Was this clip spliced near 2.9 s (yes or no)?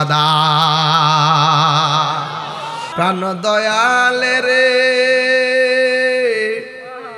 yes